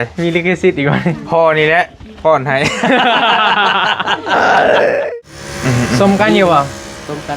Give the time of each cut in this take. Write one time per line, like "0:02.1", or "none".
0:05.1

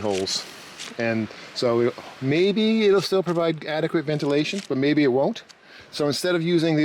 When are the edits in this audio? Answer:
0:05.8

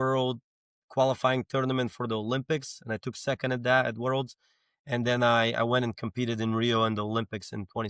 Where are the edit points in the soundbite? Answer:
none

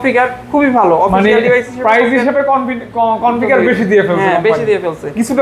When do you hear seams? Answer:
none

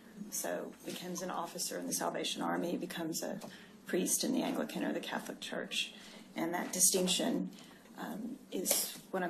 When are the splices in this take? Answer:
0:08.1

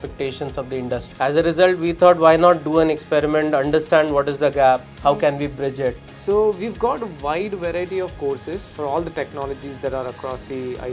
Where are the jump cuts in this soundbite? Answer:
0:01.1
0:06.1
0:08.7

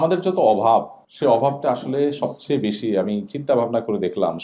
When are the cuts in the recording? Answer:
0:01.0

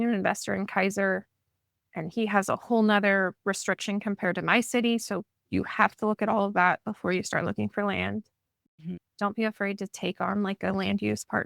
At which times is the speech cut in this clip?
0:09.1

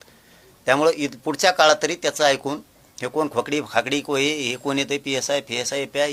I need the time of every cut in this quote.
none

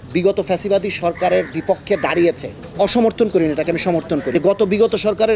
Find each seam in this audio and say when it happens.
0:02.6
0:04.3

